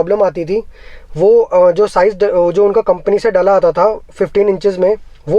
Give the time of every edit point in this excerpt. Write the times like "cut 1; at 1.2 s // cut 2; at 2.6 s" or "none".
none